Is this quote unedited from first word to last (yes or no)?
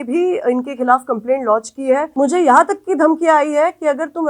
no